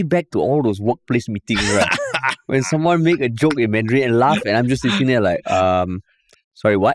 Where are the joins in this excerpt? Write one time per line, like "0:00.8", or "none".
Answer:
none